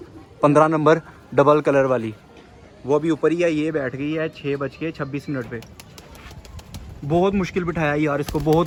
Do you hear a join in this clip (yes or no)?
no